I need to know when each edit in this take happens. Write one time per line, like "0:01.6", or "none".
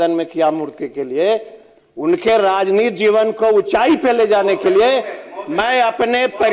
none